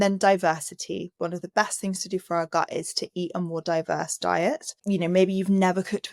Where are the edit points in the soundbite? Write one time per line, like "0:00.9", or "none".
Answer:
0:01.2
0:04.7

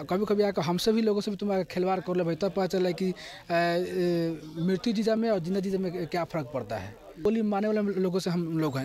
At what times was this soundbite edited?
0:07.3

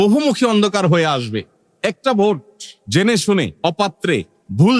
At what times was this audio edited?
0:03.5

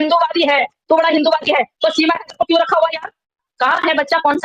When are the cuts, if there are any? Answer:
0:03.5

